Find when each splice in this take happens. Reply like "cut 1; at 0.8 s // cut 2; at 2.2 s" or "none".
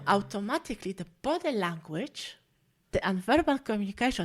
cut 1; at 2.9 s